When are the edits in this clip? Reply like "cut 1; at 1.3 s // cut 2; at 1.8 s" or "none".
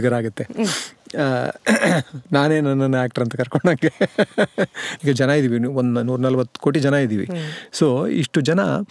cut 1; at 4.8 s